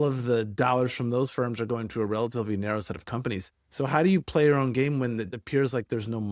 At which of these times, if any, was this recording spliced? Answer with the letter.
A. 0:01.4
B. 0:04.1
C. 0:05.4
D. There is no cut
C